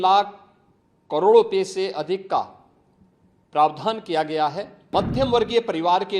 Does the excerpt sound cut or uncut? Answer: cut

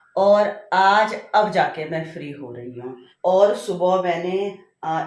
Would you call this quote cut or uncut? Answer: cut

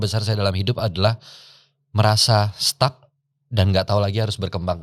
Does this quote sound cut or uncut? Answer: uncut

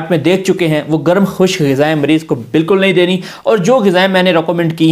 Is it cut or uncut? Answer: uncut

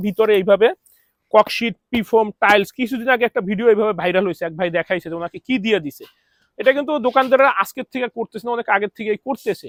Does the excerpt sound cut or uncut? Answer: uncut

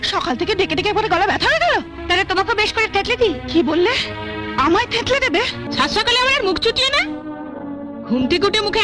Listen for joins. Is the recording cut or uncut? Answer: cut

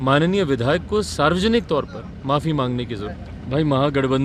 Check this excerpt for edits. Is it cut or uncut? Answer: cut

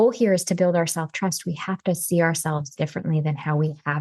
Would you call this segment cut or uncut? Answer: uncut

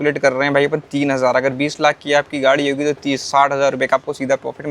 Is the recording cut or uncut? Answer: uncut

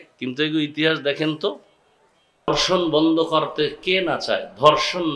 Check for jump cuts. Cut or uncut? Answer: cut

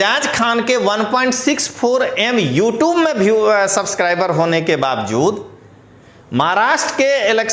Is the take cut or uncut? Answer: uncut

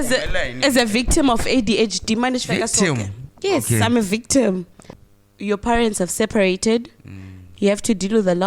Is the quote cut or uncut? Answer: cut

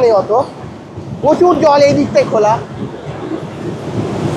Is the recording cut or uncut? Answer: uncut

